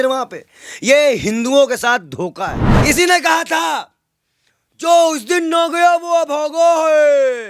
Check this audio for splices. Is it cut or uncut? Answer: cut